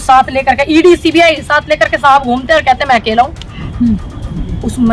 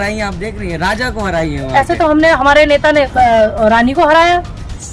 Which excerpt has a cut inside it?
first; 1 cut; at 3.6 s

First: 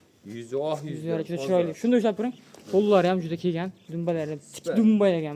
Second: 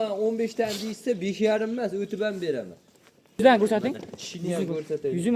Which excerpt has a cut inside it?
second; 1 cut; at 3.4 s

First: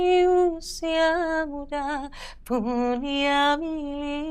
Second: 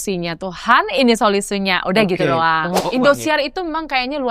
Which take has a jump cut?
second; 1 cut; at 2.8 s

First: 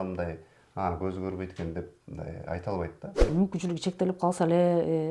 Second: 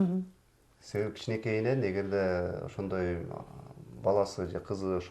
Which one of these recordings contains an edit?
first; 1 cut; at 3.2 s

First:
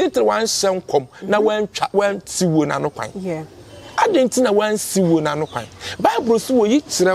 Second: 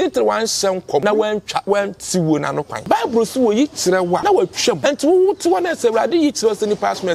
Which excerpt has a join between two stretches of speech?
second; 3 cuts; at 1.0 s, 2.7 s, 4.4 s

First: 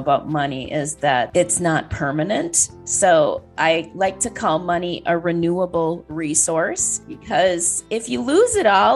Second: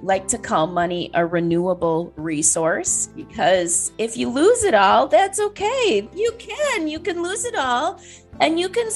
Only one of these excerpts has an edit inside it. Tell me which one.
second; 1 cut; at 6.1 s

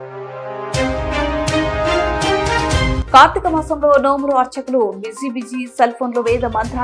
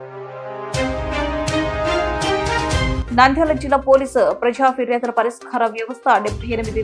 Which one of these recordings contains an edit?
first; 1 cut; at 3.0 s

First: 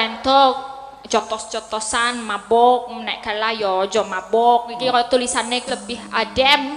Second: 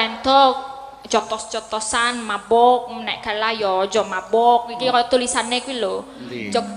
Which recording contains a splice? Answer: first; 1 cut; at 5.6 s

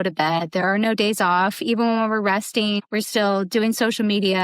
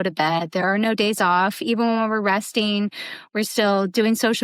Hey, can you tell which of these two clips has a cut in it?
first; 1 cut; at 2.8 s

